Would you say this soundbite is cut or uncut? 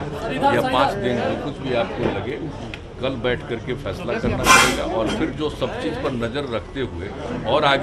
uncut